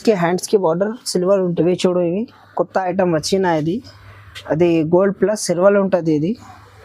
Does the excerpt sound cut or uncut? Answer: cut